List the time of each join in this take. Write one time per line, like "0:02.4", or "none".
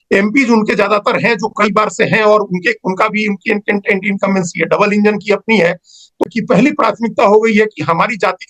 0:06.2